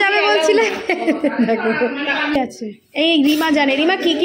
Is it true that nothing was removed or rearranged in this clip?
no; 1 cut; at 2.3 s

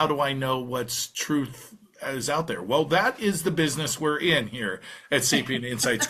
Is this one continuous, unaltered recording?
yes; 0 cuts

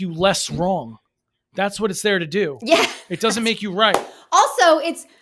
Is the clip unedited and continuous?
yes; 0 cuts

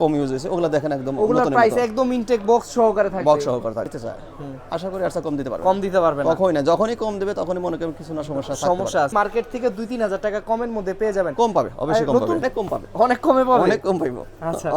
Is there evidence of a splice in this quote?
yes; 3 cuts; at 3.9 s, 9.1 s, 12.4 s

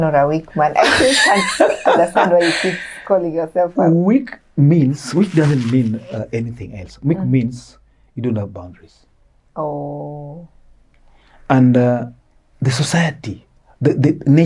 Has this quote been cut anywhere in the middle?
no; 0 cuts

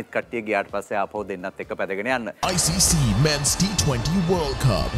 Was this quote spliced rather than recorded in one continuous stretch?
yes; 1 cut; at 2.4 s

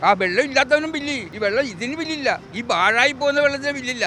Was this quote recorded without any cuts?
no; 2 cuts; at 1.3 s, 2.5 s

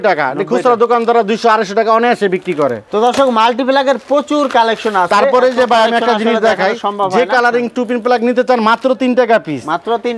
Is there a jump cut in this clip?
no; 0 cuts

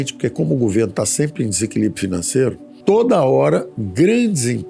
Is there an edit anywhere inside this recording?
yes; 2 cuts; at 2.7 s, 3.8 s

